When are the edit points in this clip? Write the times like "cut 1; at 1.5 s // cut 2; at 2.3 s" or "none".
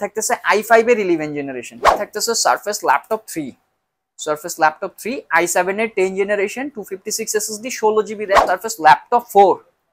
cut 1; at 2.0 s // cut 2; at 8.4 s